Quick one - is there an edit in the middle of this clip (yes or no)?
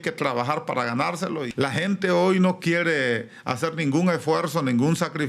yes